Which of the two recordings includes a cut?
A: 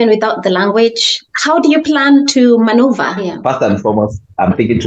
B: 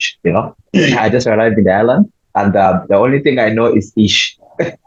A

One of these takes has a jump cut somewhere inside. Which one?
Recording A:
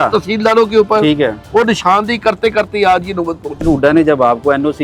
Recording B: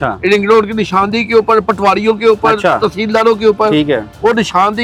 A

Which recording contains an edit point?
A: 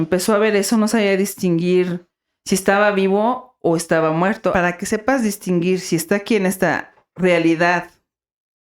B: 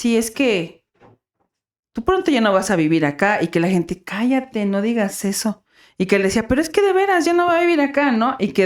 A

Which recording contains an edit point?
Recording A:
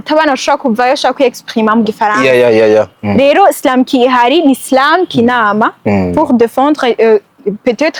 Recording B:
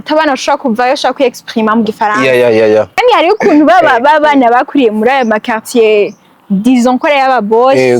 B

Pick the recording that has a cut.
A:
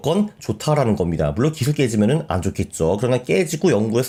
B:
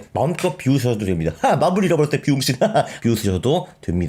B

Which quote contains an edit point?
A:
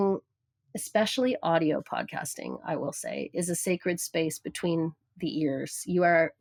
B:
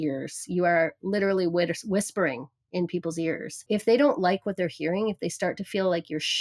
B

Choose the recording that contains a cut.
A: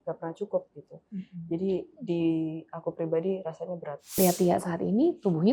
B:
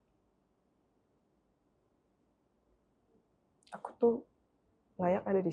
A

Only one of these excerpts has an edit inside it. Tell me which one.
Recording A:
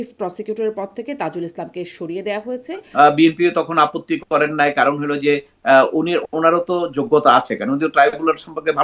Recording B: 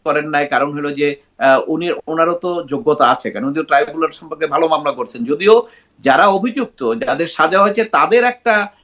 A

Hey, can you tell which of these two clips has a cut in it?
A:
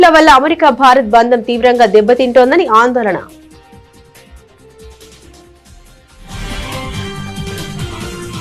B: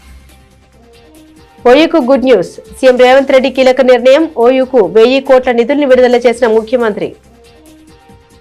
B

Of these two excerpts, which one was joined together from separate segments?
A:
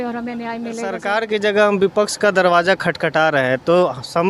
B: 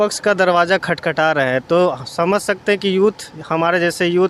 A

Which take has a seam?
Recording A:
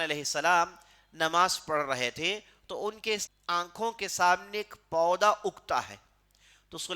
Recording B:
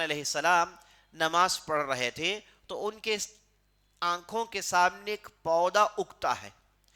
A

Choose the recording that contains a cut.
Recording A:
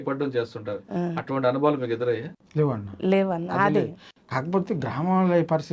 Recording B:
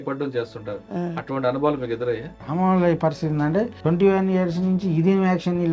B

